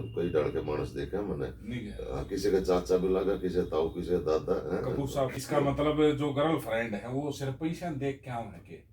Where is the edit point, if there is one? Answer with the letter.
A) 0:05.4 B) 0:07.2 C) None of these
A